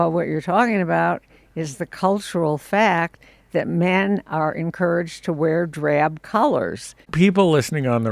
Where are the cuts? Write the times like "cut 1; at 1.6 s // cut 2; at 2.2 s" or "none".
cut 1; at 7.0 s